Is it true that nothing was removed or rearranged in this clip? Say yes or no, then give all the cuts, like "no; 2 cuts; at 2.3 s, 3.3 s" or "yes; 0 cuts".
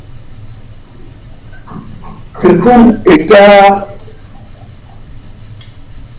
yes; 0 cuts